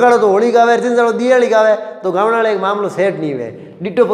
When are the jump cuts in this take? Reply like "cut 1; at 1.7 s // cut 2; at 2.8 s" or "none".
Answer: none